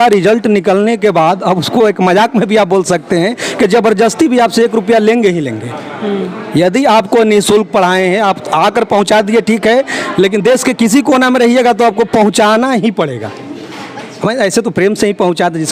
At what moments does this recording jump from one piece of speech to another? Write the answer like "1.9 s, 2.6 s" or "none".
none